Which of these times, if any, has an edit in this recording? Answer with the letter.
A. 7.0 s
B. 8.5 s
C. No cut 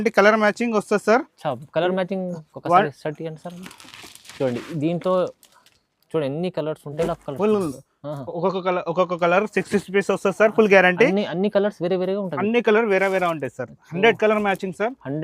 A